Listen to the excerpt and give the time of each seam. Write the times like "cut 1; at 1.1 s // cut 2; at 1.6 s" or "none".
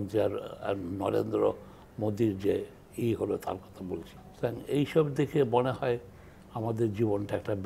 cut 1; at 4.2 s